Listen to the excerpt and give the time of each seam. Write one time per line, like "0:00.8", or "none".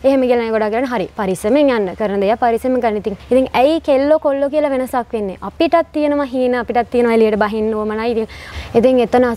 0:03.1
0:08.4